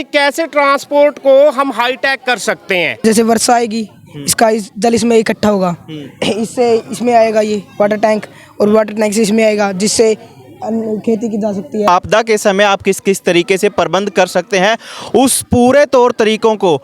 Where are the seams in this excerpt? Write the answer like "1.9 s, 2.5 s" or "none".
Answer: 3.0 s, 11.9 s